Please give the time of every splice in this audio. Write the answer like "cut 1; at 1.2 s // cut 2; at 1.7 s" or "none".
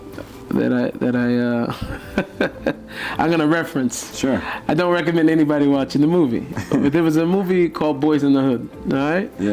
none